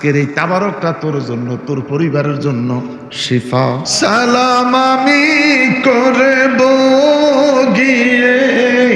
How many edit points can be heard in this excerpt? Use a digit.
1